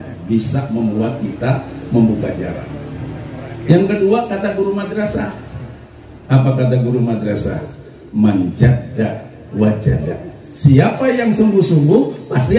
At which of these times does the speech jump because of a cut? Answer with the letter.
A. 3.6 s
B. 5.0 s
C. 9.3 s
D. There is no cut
D